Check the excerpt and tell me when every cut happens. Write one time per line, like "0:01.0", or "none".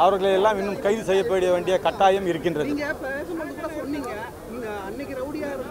none